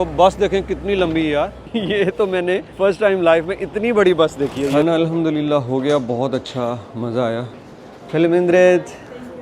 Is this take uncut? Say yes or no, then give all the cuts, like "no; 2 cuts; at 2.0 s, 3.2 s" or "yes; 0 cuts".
no; 3 cuts; at 1.6 s, 2.7 s, 4.8 s